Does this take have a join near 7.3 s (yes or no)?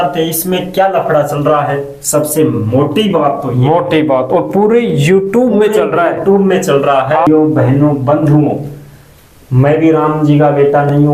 yes